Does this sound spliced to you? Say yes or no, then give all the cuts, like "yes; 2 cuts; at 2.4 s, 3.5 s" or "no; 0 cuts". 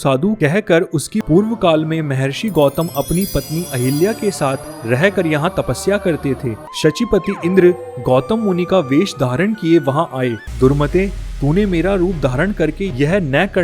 yes; 3 cuts; at 1.2 s, 6.6 s, 10.4 s